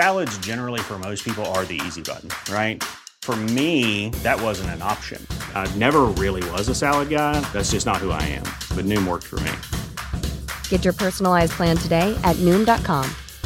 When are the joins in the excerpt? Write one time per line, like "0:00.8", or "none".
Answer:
none

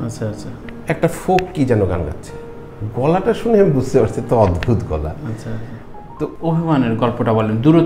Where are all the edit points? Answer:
0:06.3

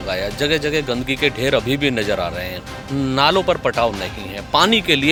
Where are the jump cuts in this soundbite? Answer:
none

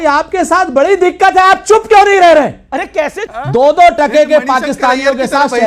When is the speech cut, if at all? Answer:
0:03.1

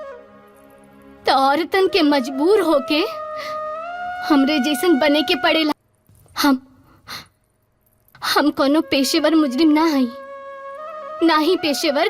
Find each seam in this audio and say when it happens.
0:05.7

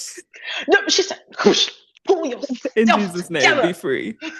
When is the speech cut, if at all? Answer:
none

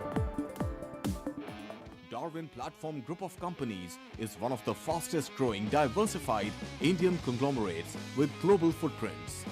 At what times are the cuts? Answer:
0:01.4

